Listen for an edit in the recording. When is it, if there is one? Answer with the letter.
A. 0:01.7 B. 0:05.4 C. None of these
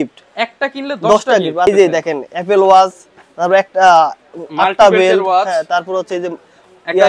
A